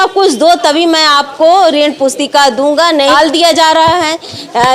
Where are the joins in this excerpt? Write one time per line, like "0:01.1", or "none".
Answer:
0:03.1